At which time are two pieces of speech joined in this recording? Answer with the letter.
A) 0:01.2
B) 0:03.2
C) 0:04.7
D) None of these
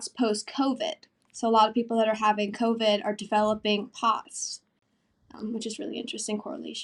D